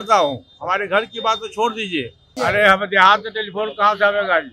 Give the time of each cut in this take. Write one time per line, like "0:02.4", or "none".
0:02.3